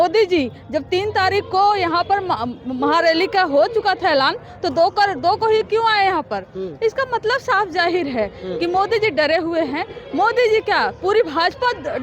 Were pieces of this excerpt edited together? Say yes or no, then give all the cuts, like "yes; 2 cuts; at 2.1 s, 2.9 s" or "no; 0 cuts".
no; 0 cuts